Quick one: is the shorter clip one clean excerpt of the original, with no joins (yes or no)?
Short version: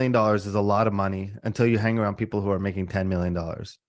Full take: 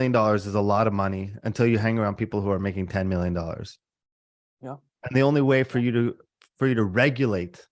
yes